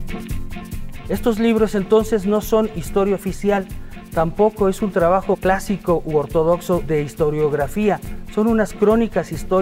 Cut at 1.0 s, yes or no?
yes